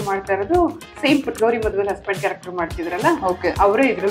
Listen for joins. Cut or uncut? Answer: uncut